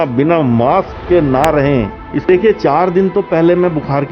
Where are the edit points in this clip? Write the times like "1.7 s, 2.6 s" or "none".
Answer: 2.2 s